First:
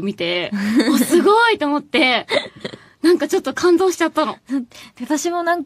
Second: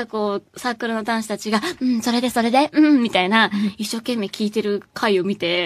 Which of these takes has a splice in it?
first; 1 cut; at 4.6 s

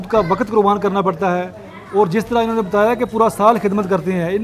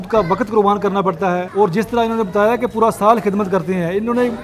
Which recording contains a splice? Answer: second; 1 cut; at 1.5 s

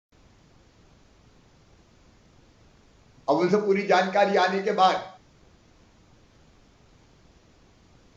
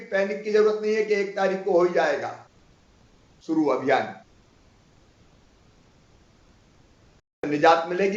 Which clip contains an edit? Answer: second; 1 cut; at 7.2 s

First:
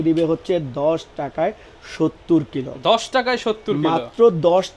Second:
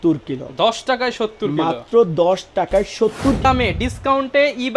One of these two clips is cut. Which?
second; 1 cut; at 3.4 s

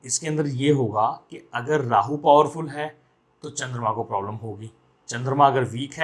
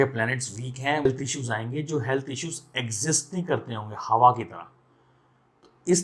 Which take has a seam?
second; 1 cut; at 1.1 s

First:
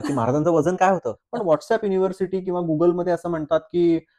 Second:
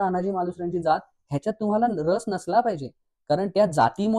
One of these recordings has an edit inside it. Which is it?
first; 1 cut; at 1.2 s

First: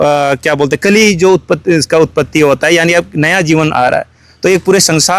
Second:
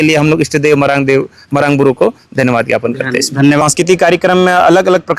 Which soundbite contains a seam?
second; 1 cut; at 3.6 s

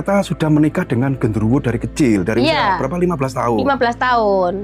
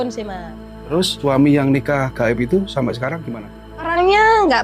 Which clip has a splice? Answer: second; 2 cuts; at 1.1 s, 3.2 s

